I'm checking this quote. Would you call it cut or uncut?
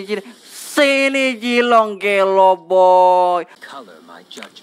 cut